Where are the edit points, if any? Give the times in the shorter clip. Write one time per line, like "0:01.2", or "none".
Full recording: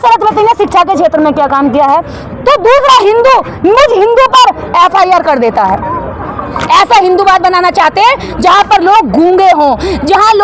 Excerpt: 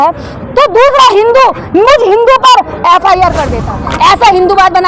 0:03.5